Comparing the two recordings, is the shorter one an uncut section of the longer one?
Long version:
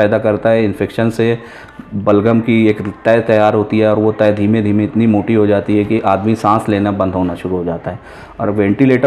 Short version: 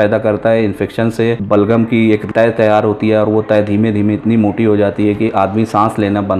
no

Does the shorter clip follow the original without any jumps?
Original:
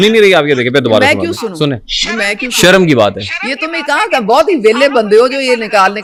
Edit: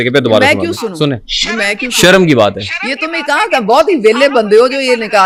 yes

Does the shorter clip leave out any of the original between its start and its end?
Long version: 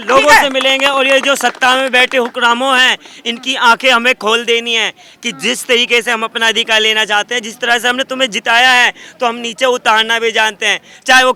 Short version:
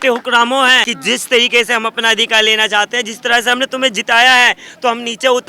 yes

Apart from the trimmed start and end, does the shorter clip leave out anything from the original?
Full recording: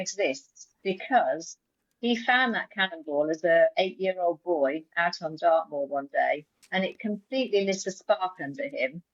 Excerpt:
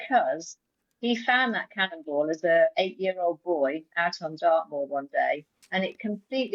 no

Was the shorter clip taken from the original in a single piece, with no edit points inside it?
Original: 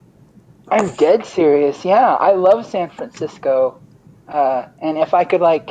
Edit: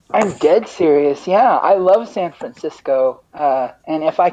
no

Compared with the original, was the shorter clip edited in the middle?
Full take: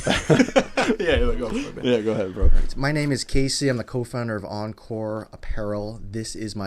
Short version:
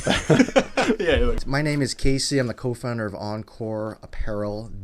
yes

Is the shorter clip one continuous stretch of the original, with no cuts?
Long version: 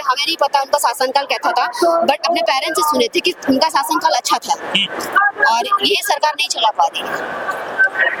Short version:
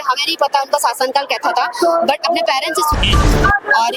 no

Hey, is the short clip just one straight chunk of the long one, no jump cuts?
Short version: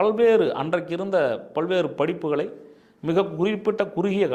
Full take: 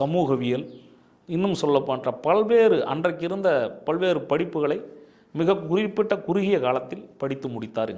yes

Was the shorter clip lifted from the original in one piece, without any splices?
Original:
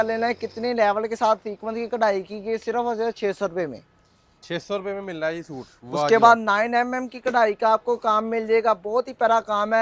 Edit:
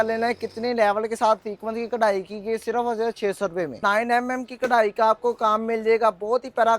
no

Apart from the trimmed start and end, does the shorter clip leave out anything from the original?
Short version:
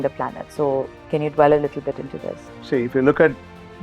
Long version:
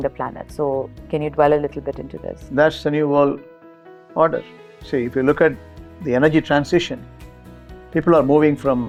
yes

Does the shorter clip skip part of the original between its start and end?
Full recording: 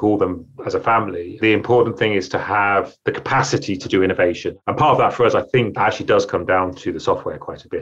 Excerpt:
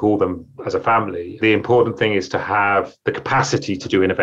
no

